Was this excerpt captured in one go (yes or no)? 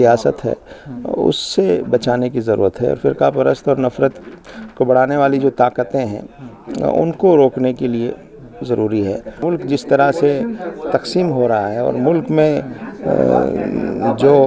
no